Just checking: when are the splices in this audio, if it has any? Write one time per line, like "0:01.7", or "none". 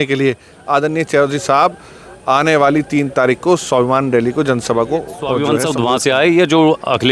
0:05.4